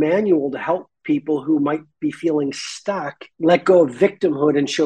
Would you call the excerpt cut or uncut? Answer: cut